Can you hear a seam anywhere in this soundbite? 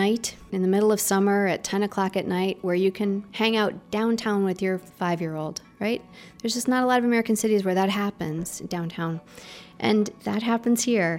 no; 0 cuts

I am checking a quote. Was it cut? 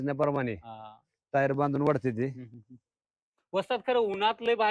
no; 0 cuts

